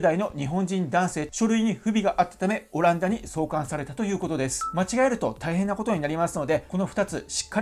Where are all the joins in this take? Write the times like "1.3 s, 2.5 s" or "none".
1.2 s, 4.6 s